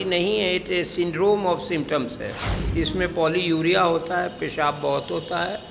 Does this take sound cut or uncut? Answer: uncut